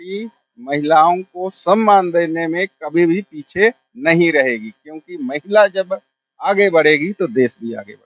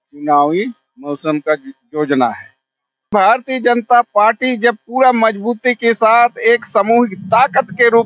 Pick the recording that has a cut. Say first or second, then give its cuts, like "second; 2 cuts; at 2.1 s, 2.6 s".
second; 1 cut; at 3.1 s